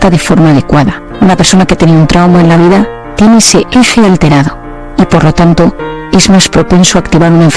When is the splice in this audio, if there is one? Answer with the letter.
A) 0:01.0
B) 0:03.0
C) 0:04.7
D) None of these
A